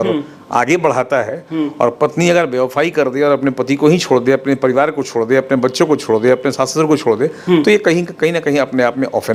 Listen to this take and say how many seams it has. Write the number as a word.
zero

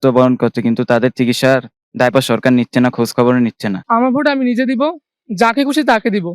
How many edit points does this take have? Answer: one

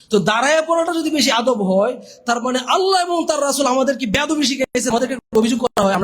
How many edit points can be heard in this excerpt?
one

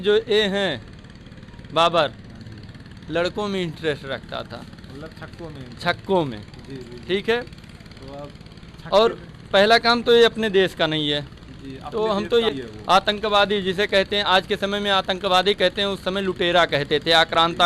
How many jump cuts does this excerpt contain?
one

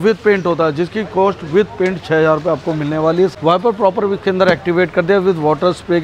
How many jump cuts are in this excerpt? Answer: one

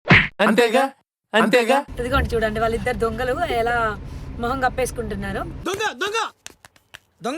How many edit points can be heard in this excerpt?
one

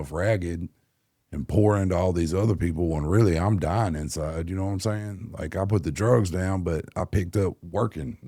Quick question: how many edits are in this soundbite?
zero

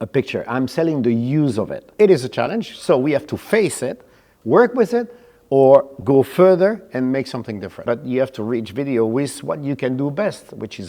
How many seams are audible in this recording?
two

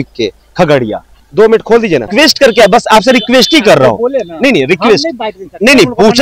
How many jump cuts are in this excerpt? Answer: two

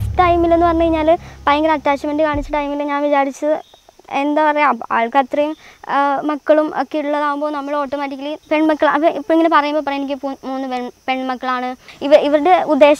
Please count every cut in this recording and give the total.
two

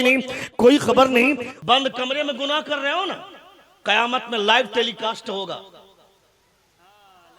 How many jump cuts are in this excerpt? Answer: one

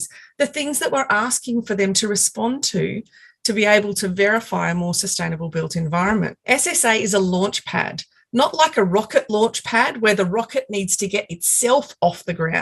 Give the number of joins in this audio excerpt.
one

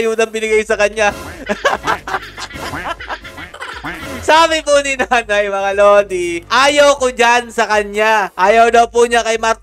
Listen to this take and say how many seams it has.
zero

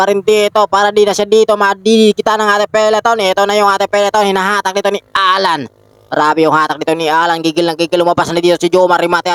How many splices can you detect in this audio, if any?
zero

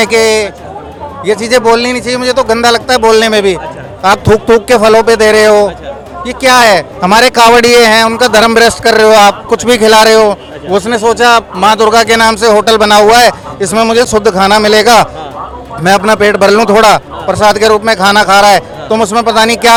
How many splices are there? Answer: zero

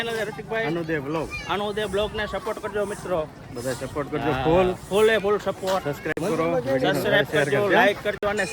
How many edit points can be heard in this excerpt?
zero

